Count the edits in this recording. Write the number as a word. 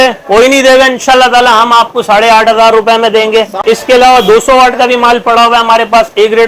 one